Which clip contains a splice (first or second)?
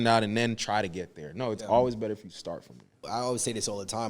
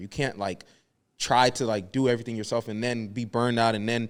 first